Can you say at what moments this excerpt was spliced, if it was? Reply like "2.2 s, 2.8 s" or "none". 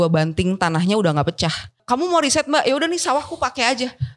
1.8 s